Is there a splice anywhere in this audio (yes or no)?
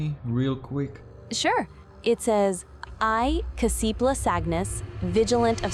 no